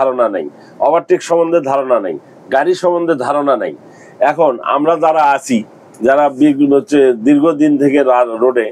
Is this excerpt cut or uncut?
uncut